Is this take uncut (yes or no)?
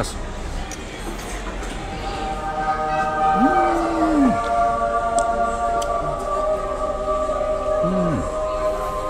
yes